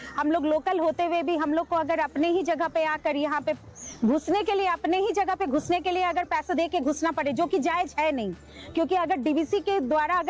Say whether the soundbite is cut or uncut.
uncut